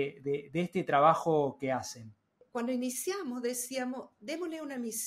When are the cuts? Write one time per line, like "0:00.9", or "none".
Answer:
0:02.4